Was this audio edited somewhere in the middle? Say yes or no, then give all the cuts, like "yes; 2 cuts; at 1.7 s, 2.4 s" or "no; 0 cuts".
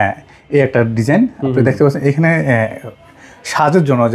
no; 0 cuts